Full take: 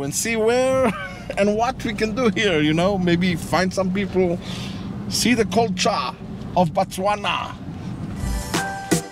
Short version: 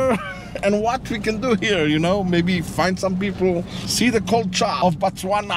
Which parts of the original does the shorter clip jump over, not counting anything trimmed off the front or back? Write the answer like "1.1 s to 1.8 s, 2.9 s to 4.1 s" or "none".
4.5 s to 5.0 s, 6.0 s to 6.5 s

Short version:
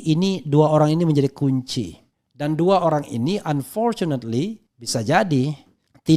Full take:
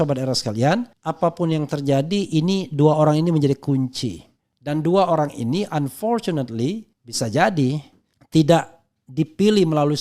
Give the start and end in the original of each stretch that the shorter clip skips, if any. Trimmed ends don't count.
none

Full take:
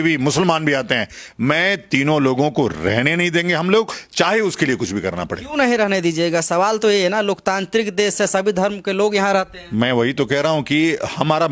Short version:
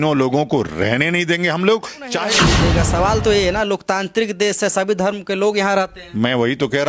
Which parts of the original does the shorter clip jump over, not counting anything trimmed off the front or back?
4.4 s to 5.9 s

